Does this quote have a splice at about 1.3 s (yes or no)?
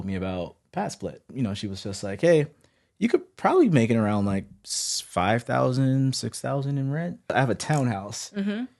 yes